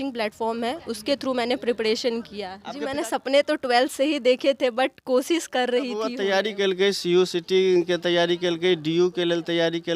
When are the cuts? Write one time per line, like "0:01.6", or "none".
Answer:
0:02.8
0:05.9